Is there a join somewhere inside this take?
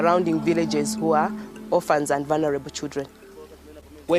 yes; 1 cut; at 2.5 s

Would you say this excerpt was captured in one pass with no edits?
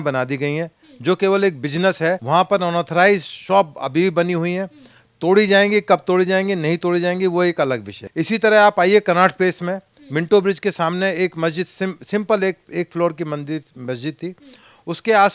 no; 2 cuts; at 2.2 s, 8.0 s

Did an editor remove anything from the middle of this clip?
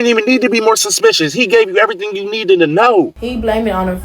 yes; 1 cut; at 3.2 s

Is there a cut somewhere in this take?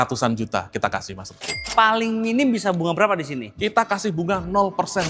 yes; 1 cut; at 1.7 s

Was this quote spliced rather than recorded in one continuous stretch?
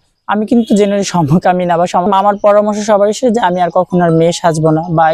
yes; 1 cut; at 2.1 s

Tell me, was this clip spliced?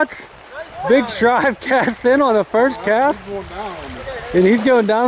no; 0 cuts

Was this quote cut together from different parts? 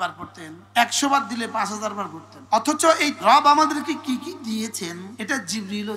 yes; 2 cuts; at 3.2 s, 5.1 s

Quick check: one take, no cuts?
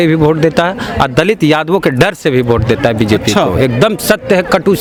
yes; 0 cuts

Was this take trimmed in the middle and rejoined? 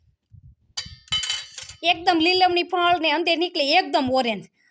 no; 0 cuts

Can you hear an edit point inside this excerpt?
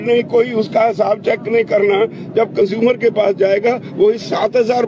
no; 0 cuts

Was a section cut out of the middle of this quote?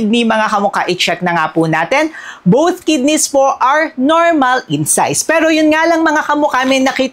no; 0 cuts

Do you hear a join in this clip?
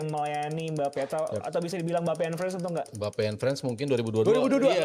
no; 0 cuts

